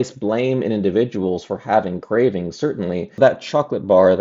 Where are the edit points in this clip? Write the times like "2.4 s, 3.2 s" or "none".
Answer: 3.1 s